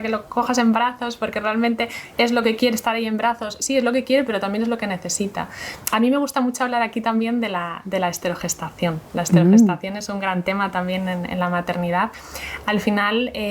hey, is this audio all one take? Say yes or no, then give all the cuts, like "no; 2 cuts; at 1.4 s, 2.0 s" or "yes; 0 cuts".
yes; 0 cuts